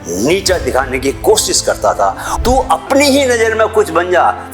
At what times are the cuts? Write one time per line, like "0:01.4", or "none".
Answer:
0:02.3